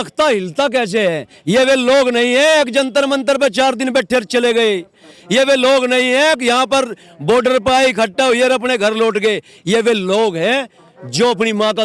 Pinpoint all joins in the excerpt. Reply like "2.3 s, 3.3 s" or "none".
none